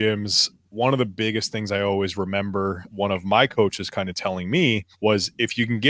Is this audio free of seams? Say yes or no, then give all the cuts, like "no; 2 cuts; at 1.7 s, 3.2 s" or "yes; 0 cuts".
no; 2 cuts; at 2.8 s, 4.9 s